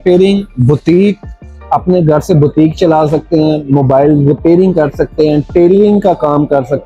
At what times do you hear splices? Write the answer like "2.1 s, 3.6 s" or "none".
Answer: none